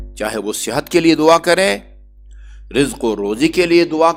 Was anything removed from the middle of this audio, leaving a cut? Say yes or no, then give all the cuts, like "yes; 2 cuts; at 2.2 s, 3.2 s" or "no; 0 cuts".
no; 0 cuts